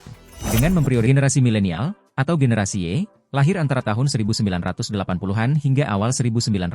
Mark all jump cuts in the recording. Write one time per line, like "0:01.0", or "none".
0:01.1